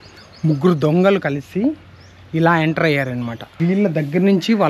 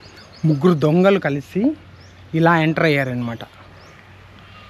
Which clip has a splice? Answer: first; 1 cut; at 3.4 s

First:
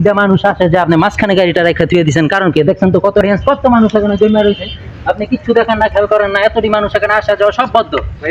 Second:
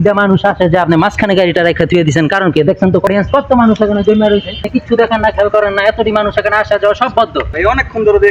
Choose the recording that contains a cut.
second; 3 cuts; at 3.1 s, 4.6 s, 7.5 s

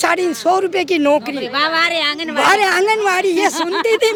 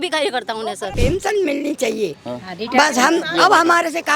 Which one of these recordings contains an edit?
second; 1 cut; at 0.9 s

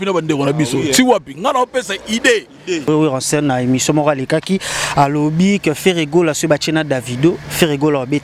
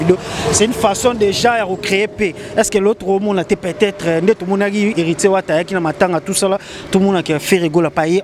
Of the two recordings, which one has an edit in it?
first; 1 cut; at 2.9 s

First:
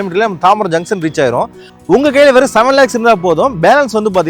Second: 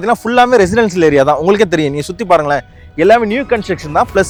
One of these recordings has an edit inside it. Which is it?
first; 1 cut; at 1.7 s

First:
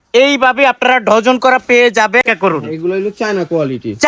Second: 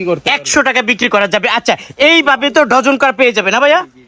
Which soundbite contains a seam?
first; 1 cut; at 2.2 s

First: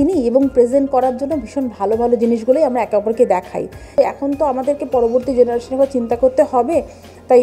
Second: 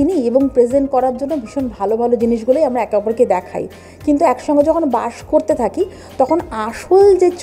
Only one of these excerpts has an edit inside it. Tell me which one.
first; 1 cut; at 3.9 s

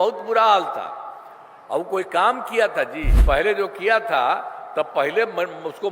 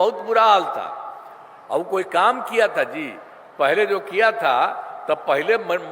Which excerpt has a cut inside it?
first; 1 cut; at 3.1 s

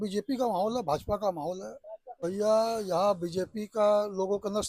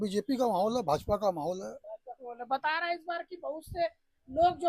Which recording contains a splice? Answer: first; 1 cut; at 2.0 s

